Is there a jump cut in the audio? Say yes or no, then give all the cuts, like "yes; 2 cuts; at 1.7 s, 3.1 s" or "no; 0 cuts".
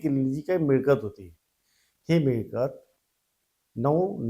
no; 0 cuts